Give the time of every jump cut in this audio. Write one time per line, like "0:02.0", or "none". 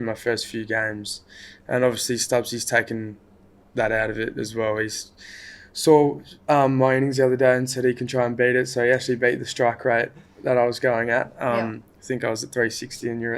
none